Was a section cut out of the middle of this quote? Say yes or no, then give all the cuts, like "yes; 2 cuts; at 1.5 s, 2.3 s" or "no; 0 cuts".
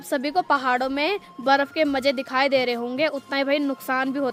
no; 0 cuts